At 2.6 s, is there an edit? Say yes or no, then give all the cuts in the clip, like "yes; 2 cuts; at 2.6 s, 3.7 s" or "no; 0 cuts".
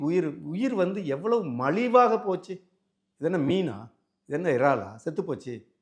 no; 0 cuts